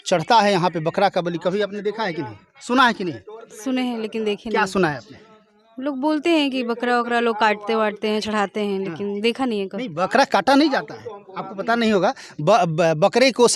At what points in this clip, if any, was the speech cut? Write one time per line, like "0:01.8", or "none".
none

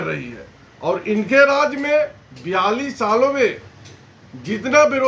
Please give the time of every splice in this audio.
none

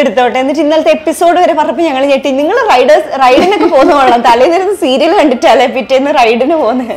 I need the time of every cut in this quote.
none

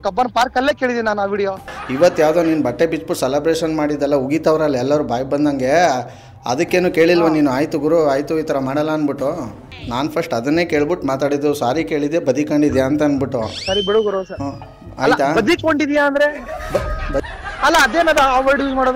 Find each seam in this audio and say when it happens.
0:01.7
0:09.8
0:17.2

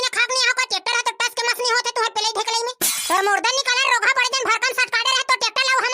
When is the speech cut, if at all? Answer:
none

